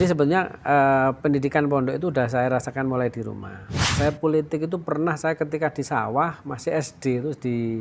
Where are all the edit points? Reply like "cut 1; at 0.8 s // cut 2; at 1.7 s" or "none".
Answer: cut 1; at 3.9 s